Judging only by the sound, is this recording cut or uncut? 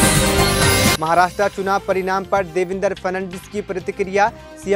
uncut